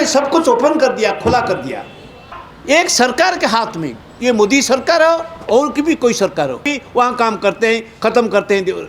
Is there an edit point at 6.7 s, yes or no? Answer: yes